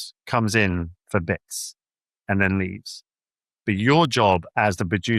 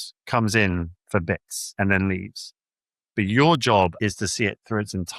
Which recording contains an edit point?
second; 2 cuts; at 1.6 s, 4.0 s

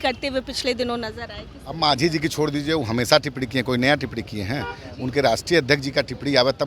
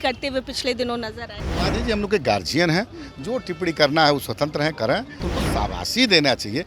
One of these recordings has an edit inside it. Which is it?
second; 2 cuts; at 1.5 s, 5.3 s

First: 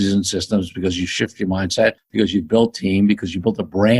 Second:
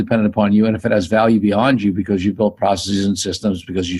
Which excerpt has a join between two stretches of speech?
first; 1 cut; at 2.0 s

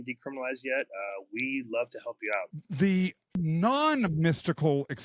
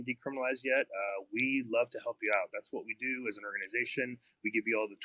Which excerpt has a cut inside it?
first; 2 cuts; at 2.6 s, 3.2 s

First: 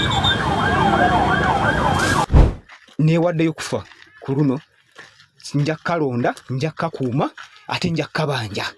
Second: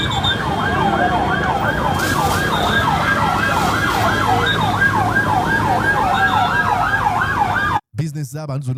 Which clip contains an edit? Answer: first; 1 cut; at 2.2 s

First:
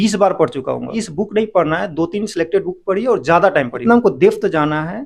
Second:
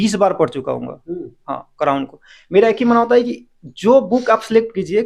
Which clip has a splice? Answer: first; 2 cuts; at 1.0 s, 3.8 s

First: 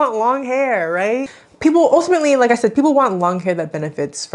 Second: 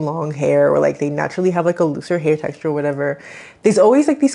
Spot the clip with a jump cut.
first; 1 cut; at 1.4 s

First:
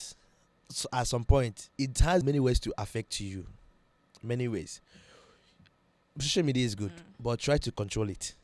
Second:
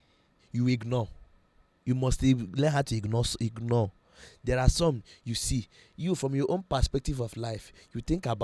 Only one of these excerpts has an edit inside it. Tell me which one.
first; 1 cut; at 2.1 s

